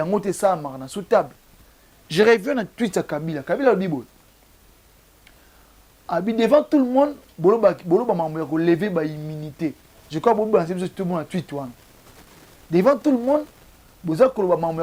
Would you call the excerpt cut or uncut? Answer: uncut